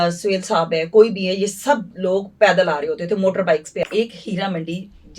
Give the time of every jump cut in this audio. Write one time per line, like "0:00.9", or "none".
0:03.9

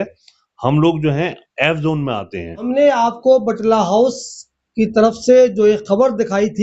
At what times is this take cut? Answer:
0:02.6

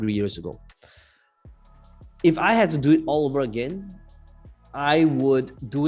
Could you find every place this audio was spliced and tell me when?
none

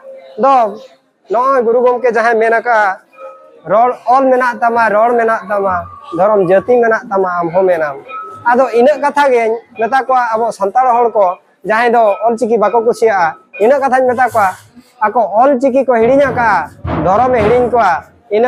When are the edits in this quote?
none

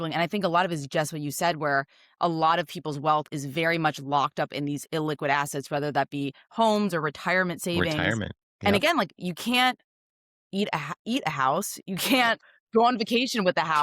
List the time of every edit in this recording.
0:12.4

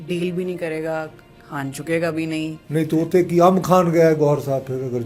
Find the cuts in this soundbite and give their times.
0:02.6

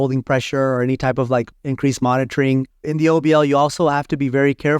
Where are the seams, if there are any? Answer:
0:01.6
0:02.8

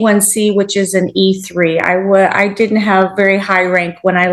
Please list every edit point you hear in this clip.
none

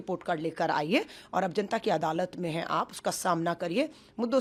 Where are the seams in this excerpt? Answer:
none

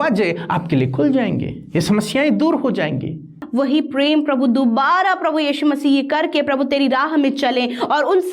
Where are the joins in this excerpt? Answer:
0:03.4

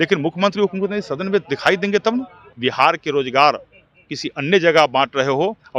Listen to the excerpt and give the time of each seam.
0:02.4

